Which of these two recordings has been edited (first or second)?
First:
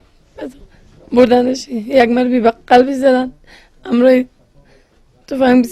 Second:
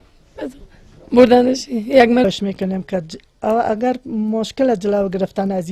first